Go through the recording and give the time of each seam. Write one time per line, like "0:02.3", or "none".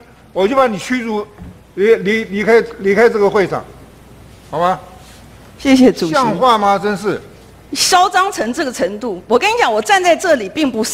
none